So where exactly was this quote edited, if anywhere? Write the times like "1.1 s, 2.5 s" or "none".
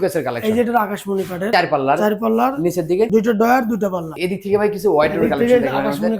4.1 s